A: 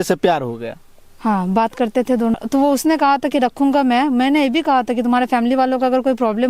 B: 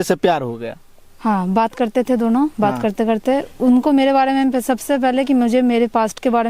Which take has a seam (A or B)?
A